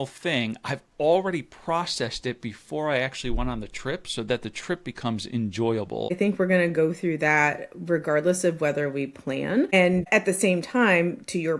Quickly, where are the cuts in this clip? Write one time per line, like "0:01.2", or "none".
0:06.2
0:09.9

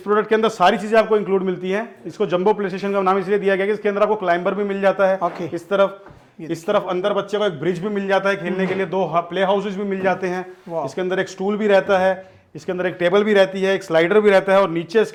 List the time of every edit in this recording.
none

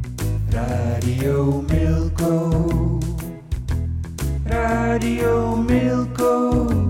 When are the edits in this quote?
none

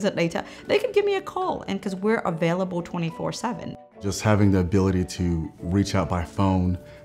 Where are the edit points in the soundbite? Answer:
0:03.7

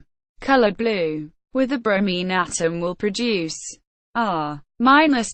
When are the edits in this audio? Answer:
0:04.2

